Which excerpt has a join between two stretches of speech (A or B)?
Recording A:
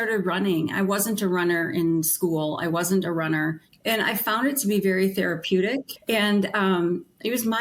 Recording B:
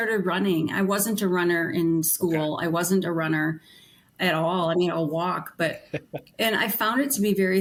A